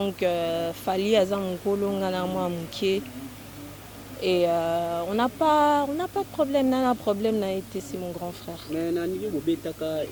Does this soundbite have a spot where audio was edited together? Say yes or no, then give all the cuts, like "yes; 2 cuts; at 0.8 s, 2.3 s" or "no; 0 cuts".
no; 0 cuts